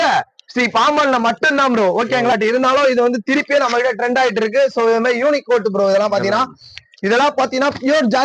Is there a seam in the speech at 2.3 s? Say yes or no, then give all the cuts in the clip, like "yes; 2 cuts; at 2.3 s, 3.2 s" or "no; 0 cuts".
yes; 1 cut; at 2.3 s